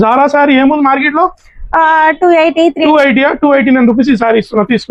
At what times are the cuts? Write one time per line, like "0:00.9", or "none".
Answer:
none